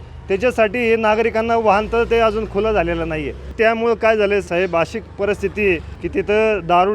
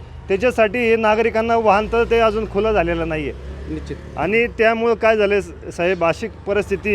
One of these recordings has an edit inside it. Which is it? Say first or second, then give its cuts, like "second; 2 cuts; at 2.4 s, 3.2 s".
first; 3 cuts; at 3.5 s, 4.5 s, 5.9 s